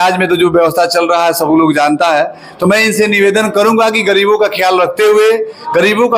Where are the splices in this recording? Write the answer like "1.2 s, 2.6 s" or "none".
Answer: none